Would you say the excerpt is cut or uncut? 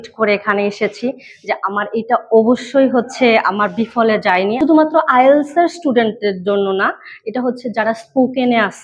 cut